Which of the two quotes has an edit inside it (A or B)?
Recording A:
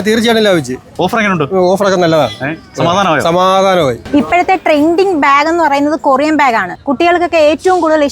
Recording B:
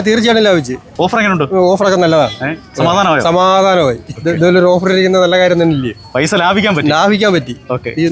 A